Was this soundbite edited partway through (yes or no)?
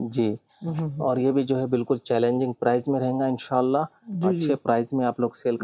no